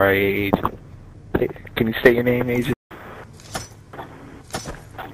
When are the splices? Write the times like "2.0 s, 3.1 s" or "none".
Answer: none